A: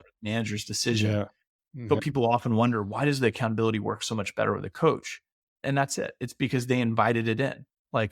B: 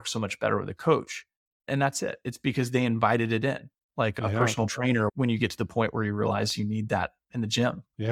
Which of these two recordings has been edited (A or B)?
A